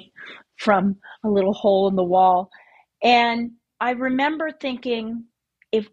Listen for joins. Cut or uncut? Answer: cut